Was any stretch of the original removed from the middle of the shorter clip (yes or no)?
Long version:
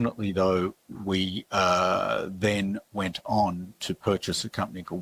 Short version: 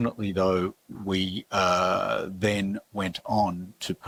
no